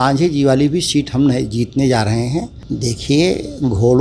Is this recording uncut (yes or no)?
no